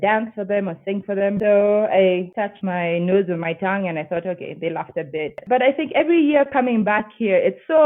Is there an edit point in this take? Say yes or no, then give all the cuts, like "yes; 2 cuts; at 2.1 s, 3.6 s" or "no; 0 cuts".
yes; 3 cuts; at 1.4 s, 2.6 s, 5.4 s